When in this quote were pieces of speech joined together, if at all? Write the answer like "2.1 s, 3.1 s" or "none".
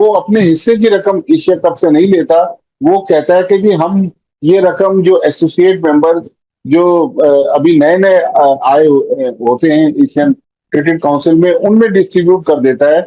none